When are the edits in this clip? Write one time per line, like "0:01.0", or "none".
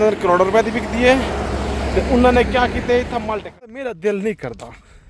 0:03.3